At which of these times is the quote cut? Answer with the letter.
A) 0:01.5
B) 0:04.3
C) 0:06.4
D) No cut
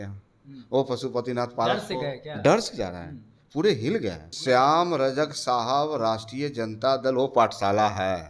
B